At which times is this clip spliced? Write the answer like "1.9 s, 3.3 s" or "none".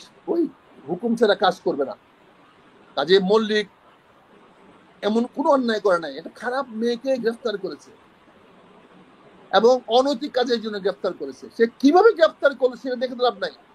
none